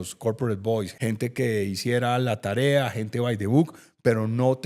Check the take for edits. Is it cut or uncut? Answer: cut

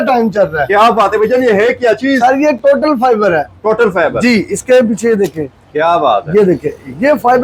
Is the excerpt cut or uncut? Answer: uncut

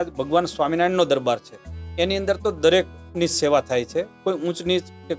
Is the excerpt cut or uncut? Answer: uncut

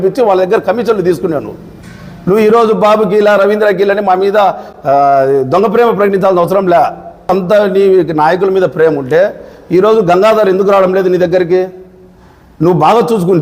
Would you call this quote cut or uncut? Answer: cut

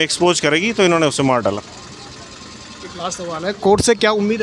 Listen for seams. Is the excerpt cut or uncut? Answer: uncut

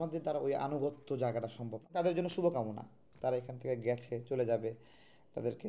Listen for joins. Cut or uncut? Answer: cut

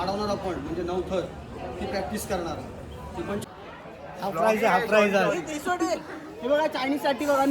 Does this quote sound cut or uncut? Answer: cut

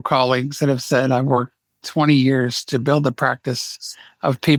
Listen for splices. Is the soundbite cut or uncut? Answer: uncut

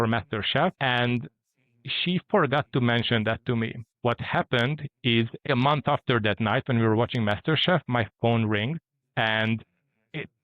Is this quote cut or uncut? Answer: cut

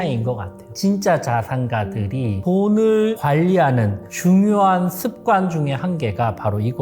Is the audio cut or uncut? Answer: cut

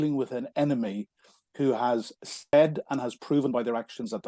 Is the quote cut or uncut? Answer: cut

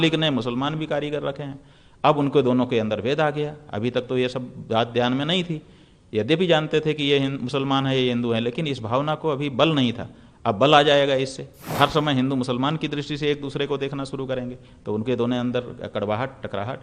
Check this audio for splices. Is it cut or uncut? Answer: cut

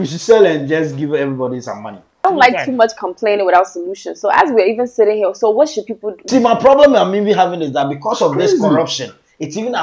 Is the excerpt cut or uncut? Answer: cut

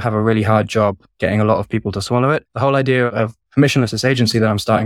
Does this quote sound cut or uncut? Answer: cut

